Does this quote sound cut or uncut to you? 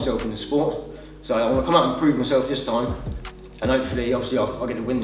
uncut